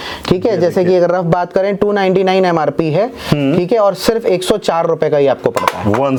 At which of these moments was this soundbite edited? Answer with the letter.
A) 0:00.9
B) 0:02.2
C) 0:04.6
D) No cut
D